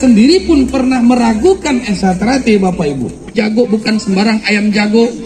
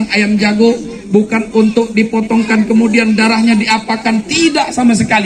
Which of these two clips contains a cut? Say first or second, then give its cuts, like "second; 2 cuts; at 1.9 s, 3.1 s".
first; 1 cut; at 3.3 s